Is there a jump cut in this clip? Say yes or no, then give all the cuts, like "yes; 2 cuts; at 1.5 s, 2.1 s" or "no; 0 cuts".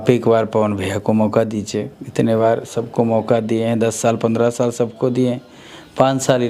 no; 0 cuts